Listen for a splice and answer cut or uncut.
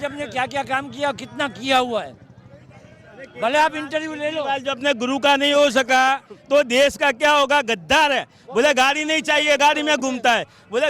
uncut